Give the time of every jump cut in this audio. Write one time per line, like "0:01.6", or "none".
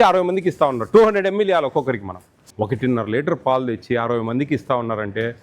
0:02.3